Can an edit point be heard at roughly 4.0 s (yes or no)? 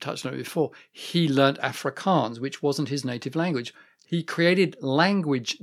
yes